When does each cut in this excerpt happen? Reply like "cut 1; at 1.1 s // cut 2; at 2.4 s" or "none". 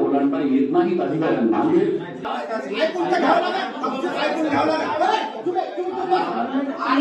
cut 1; at 2.3 s